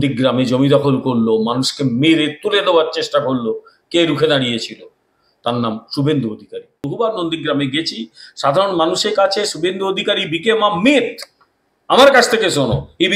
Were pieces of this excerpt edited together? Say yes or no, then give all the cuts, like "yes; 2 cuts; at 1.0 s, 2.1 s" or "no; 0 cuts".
yes; 1 cut; at 6.8 s